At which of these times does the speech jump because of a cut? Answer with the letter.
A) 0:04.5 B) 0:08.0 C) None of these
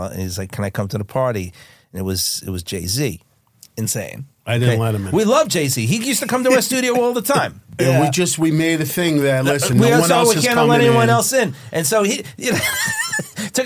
C